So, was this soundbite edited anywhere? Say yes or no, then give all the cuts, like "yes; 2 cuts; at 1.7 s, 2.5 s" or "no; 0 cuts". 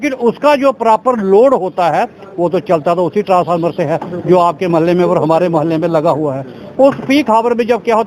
no; 0 cuts